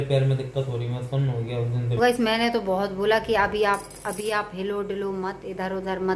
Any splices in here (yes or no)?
yes